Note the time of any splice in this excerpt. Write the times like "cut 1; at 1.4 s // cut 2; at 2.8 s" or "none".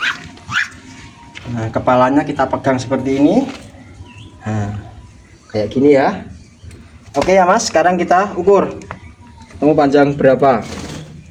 none